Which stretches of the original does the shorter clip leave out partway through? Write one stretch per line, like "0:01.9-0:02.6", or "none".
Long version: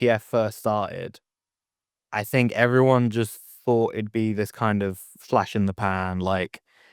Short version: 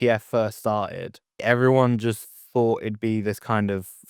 0:01.4-0:02.5